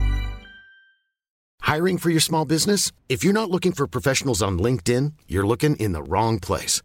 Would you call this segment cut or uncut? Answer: cut